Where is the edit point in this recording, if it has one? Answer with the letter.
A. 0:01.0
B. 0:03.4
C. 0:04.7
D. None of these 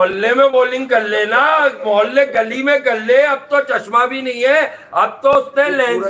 D